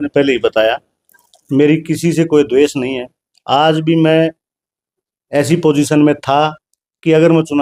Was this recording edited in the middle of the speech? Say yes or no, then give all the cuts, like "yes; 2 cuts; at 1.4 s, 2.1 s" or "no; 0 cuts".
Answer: no; 0 cuts